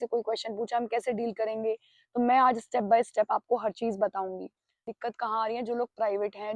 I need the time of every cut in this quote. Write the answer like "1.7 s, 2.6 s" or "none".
4.9 s